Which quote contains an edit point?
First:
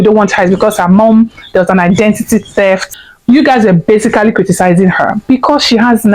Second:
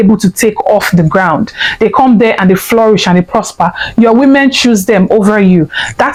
first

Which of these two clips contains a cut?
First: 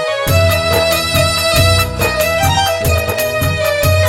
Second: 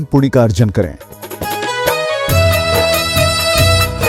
first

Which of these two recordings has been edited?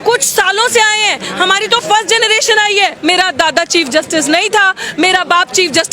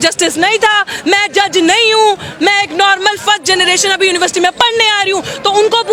first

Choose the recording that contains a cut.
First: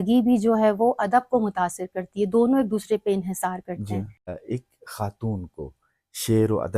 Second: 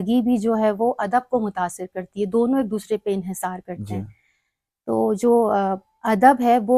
first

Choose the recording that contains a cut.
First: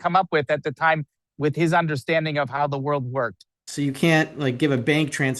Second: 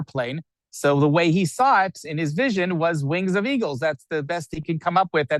first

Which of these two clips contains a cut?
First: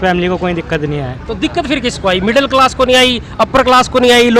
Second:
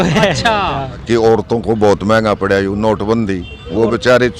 second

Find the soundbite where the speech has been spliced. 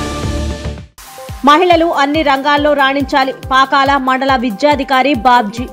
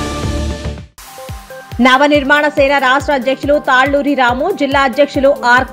second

